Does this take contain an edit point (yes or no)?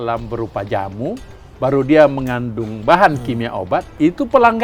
no